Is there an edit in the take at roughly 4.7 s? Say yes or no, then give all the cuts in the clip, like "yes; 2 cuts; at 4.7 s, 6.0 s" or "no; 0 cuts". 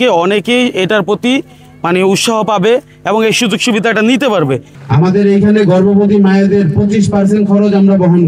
yes; 1 cut; at 4.7 s